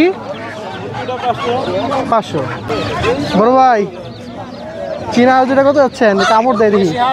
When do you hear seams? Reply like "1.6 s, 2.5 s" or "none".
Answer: 2.7 s

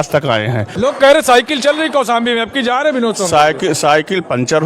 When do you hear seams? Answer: 0.9 s

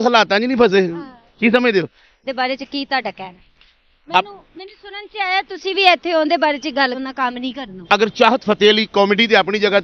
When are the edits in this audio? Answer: 2.1 s, 6.9 s

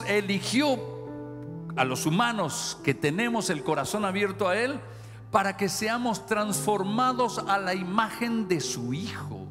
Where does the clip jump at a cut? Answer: none

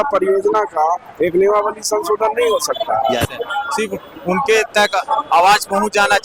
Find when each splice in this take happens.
3.6 s

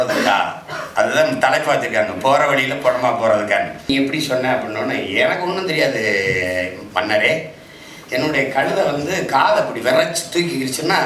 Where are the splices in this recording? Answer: 3.9 s

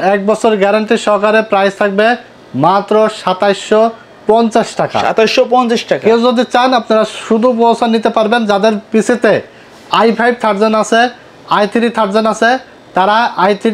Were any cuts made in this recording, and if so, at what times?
none

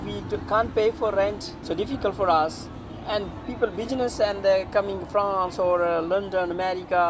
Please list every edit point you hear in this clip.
1.5 s

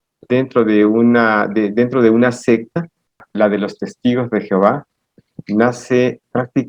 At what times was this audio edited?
3.2 s

